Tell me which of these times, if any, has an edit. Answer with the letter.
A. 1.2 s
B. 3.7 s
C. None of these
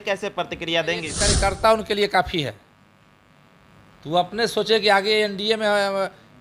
A